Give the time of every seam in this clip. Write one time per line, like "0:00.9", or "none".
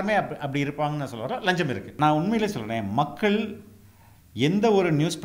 0:01.9